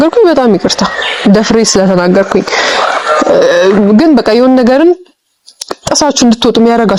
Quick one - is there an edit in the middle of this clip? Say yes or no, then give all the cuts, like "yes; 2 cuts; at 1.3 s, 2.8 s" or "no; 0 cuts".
no; 0 cuts